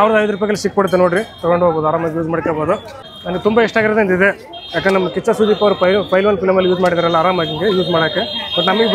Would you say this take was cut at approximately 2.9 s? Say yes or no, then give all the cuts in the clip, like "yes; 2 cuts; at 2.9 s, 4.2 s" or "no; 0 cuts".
no; 0 cuts